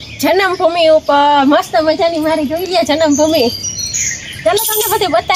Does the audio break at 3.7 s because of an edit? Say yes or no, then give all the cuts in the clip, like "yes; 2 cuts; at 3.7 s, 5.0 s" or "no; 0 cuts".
no; 0 cuts